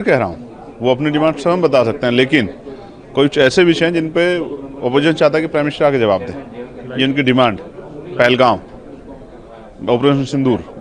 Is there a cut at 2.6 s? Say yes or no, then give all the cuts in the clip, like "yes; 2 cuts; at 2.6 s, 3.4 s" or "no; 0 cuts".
no; 0 cuts